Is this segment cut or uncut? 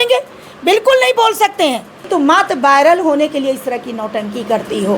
cut